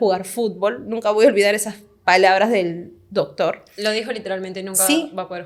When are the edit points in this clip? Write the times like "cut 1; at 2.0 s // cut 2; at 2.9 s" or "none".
none